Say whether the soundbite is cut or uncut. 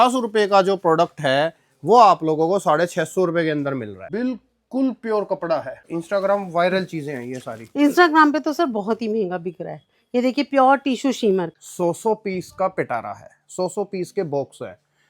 cut